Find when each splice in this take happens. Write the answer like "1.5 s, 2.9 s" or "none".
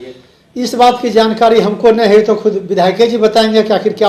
none